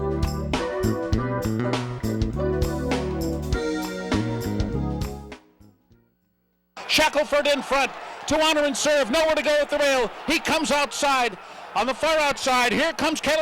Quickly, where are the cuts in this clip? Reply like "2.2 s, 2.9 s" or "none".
6.8 s